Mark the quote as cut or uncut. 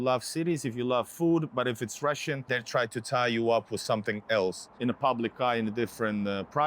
cut